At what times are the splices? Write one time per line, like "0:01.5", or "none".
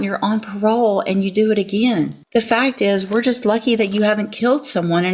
0:02.2